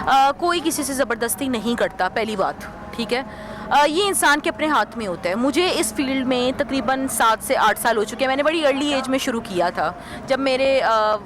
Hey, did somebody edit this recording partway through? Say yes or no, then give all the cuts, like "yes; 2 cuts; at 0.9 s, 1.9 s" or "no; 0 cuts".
no; 0 cuts